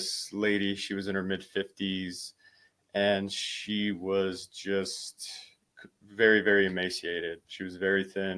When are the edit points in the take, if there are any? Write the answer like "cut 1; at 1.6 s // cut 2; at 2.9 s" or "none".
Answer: cut 1; at 7.5 s